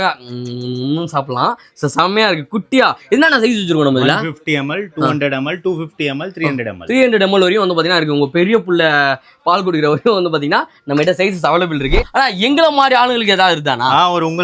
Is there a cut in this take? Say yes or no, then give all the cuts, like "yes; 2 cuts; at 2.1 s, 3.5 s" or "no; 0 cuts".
yes; 1 cut; at 12.0 s